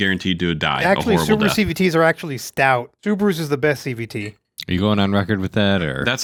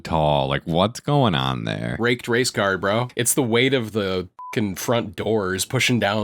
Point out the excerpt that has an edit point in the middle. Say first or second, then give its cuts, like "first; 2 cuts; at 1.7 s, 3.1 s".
second; 3 cuts; at 1.9 s, 3.2 s, 4.3 s